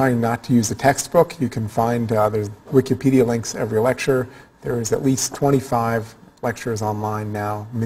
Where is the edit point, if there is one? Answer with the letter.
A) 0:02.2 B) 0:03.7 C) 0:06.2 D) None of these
B